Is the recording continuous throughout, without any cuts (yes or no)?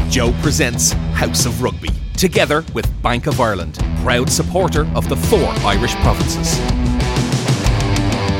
yes